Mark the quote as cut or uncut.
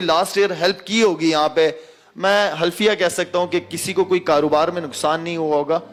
uncut